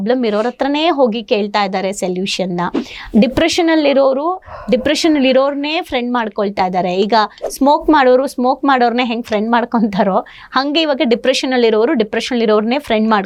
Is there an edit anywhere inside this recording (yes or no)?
no